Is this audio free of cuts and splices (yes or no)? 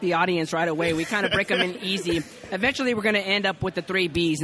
yes